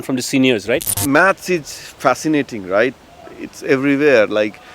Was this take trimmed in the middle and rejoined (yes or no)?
yes